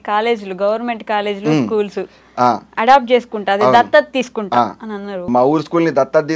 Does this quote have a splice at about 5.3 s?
yes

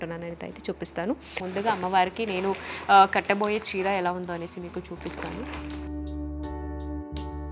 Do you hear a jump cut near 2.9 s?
no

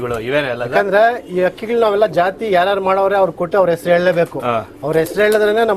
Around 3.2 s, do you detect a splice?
no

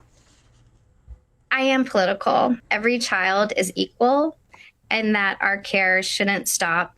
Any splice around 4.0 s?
no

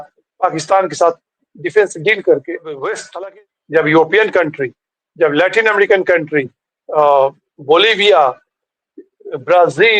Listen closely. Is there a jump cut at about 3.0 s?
yes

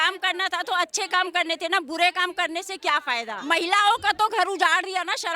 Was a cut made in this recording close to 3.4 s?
yes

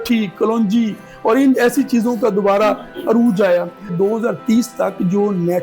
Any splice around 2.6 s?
no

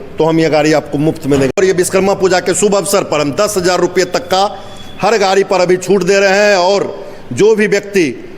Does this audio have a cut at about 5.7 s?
no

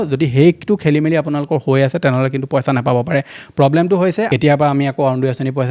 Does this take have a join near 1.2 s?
no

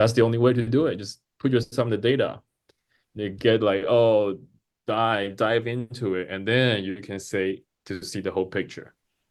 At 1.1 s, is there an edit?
no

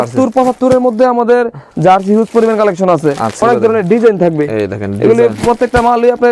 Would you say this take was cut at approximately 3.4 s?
yes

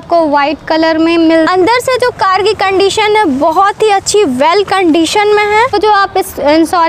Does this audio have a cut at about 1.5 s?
yes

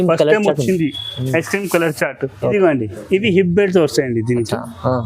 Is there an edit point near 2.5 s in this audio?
yes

